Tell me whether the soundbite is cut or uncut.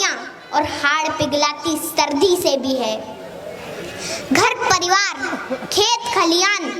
uncut